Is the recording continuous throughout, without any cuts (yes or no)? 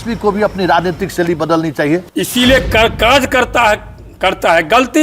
no